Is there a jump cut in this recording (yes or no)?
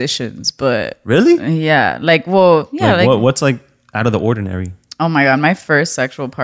no